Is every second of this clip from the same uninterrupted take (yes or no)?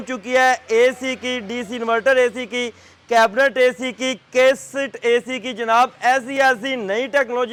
yes